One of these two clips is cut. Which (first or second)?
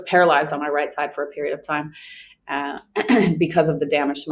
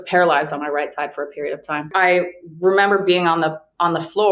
second